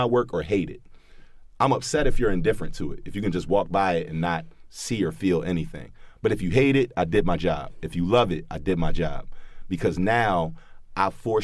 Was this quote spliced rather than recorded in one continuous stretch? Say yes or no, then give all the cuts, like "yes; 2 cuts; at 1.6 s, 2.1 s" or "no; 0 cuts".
no; 0 cuts